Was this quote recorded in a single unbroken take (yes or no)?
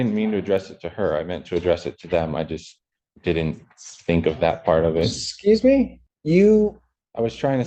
no